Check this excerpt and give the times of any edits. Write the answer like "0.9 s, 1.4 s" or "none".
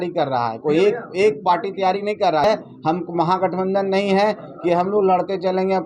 2.4 s